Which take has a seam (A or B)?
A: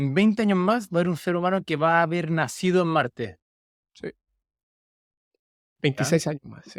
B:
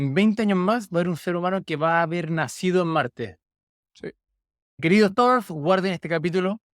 B